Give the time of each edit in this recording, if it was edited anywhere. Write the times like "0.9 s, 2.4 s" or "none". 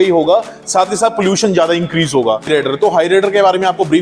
2.5 s

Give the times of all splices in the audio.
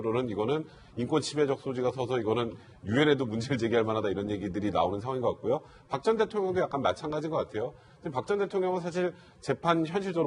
none

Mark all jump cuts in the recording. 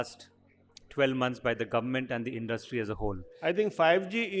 3.3 s

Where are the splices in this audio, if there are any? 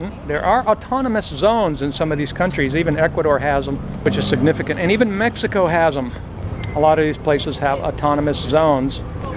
4.0 s

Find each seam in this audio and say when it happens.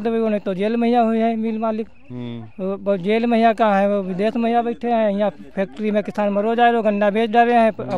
none

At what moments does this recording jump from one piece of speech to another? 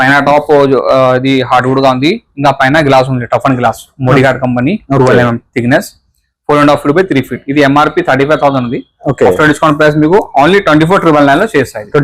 none

